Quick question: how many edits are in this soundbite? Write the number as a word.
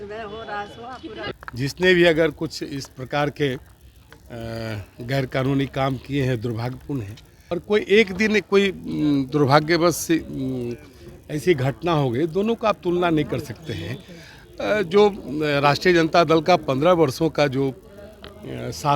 two